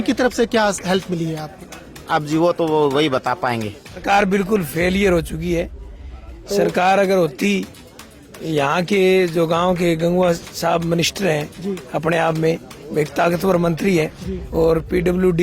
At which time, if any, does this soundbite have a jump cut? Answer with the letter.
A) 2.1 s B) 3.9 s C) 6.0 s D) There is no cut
B